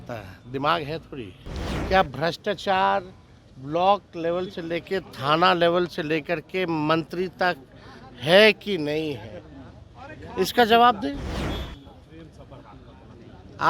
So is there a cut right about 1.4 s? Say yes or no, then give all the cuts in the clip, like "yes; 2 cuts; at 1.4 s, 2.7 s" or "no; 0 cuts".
yes; 1 cut; at 1.4 s